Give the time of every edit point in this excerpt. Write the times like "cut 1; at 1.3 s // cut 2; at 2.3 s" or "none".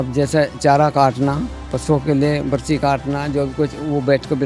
cut 1; at 1.6 s